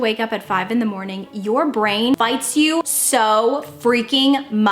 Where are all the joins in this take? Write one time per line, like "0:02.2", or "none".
0:02.5